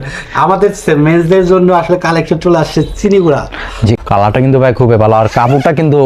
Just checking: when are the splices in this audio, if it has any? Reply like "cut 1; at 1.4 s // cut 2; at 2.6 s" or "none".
cut 1; at 4.0 s